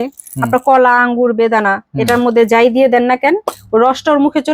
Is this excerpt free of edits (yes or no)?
yes